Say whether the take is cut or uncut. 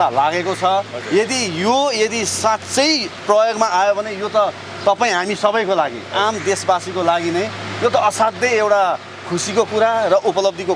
uncut